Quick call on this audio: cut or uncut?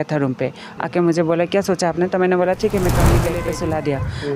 cut